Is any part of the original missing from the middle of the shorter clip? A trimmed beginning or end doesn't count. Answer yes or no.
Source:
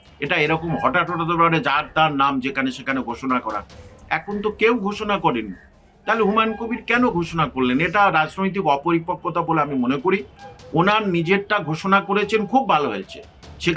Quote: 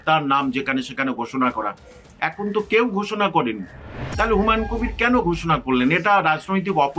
no